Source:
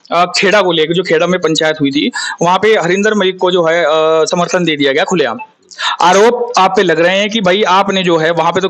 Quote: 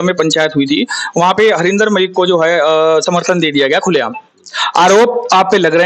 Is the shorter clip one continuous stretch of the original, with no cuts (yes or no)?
yes